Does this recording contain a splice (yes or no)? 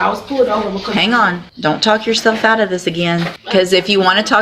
yes